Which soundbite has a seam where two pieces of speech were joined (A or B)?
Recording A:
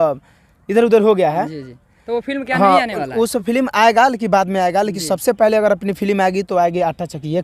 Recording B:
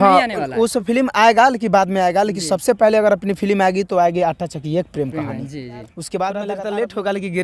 B